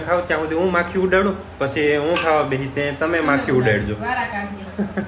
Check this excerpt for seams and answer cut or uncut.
uncut